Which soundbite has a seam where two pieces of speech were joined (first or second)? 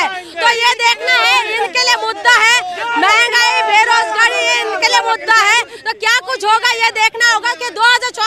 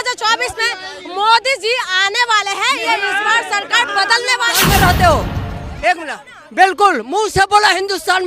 second